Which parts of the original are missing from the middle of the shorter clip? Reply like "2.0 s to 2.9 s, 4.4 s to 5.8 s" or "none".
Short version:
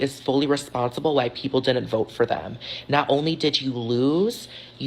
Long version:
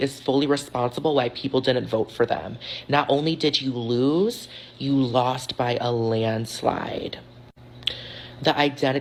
none